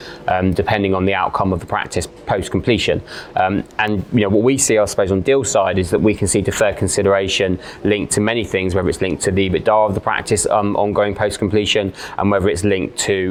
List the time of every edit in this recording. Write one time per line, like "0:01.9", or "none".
none